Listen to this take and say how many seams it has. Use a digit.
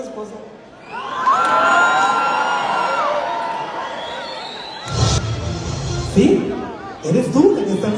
1